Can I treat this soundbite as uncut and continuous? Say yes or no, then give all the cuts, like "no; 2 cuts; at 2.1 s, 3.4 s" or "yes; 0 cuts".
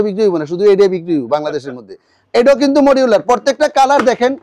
no; 1 cut; at 2.2 s